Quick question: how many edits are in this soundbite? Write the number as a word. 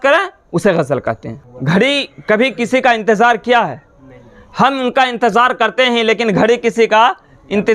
one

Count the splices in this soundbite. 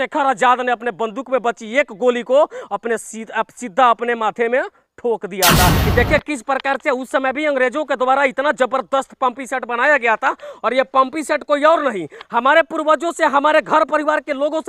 one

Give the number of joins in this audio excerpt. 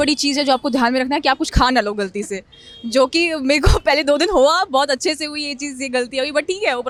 zero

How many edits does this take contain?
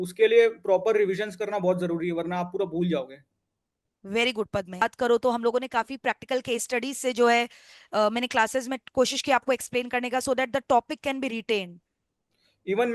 one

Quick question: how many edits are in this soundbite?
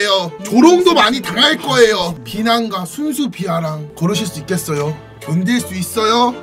three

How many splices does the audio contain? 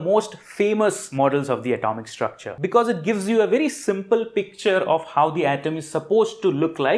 two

